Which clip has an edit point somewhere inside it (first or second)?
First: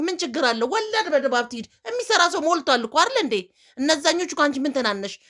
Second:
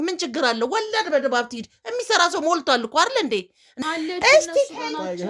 second